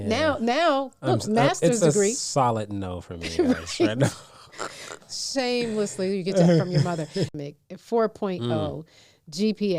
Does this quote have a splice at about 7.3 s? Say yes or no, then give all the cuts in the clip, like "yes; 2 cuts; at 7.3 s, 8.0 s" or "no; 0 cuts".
yes; 1 cut; at 7.3 s